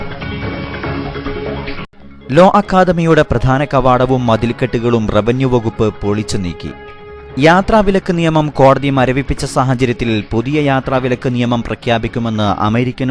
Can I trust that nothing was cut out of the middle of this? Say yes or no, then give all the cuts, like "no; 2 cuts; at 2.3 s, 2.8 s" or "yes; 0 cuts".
no; 1 cut; at 1.6 s